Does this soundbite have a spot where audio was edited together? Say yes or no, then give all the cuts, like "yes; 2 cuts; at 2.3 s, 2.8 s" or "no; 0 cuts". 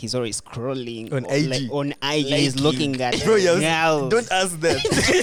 no; 0 cuts